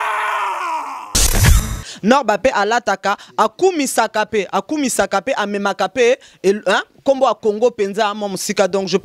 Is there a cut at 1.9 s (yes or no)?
yes